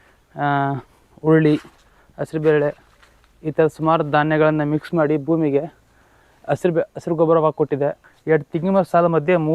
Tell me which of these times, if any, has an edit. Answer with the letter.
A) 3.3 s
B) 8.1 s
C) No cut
B